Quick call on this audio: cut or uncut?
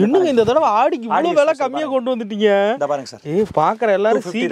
uncut